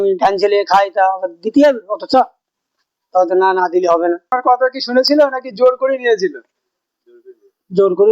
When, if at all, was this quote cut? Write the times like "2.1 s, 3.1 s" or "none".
4.3 s